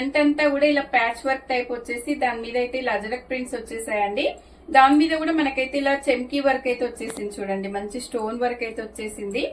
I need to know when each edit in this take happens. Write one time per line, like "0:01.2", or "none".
none